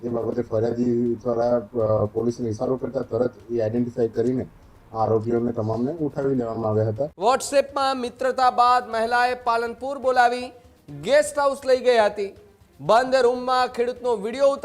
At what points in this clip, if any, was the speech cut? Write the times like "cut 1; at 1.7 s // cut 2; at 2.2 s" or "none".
cut 1; at 7.0 s